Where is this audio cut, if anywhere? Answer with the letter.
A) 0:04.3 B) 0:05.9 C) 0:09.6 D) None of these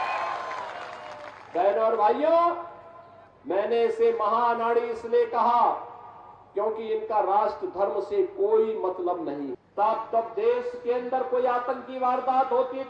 C